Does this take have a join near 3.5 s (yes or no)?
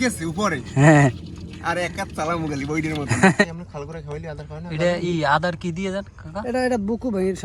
yes